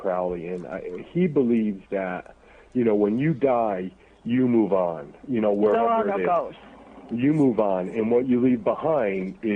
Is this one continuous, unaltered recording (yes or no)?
yes